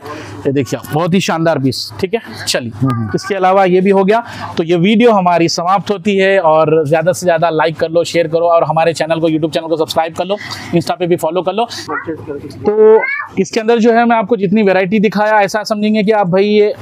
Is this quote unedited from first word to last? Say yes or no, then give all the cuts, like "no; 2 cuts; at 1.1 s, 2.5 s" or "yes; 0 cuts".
yes; 0 cuts